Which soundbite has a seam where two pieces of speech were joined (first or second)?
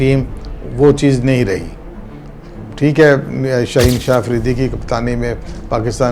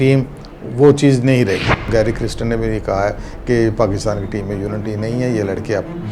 second